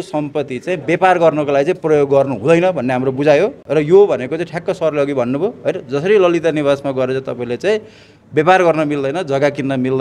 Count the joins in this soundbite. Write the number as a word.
zero